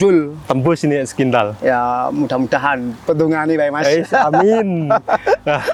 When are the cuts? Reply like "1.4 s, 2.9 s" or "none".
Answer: none